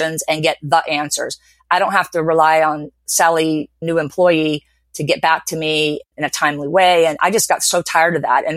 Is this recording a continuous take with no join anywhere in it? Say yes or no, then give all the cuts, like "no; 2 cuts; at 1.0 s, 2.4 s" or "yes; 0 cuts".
no; 2 cuts; at 3.8 s, 6.1 s